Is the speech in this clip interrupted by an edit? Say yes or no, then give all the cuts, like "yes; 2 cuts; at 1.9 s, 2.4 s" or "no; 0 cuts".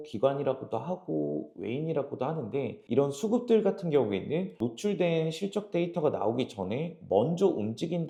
no; 0 cuts